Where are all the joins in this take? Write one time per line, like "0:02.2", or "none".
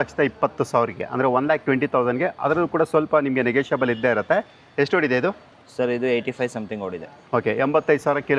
none